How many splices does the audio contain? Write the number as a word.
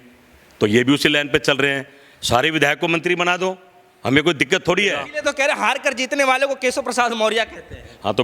one